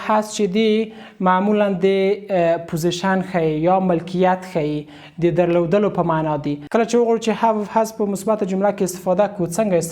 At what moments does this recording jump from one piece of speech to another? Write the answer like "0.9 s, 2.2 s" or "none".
6.6 s